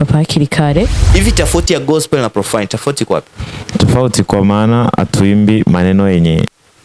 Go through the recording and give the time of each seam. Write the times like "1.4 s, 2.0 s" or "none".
1.1 s